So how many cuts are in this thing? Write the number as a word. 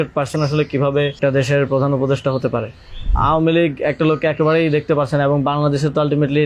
two